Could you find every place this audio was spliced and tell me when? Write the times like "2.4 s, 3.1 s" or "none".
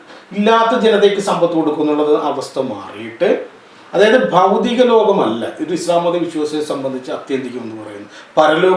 none